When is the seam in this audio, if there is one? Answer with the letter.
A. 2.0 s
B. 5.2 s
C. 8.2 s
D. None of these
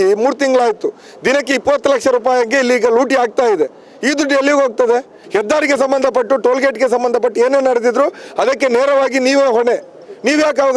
B